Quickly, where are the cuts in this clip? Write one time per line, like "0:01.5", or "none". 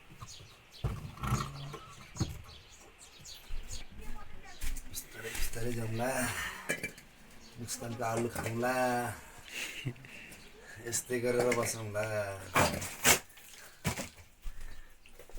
0:03.6
0:12.4